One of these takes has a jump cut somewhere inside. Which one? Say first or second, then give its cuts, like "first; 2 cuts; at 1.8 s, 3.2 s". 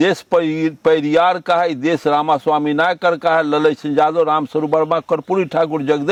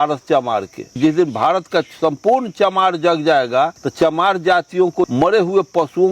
second; 3 cuts; at 1.0 s, 3.8 s, 5.1 s